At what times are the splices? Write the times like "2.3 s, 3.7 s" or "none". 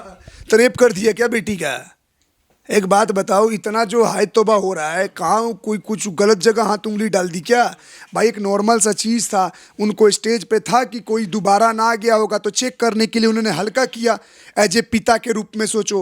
none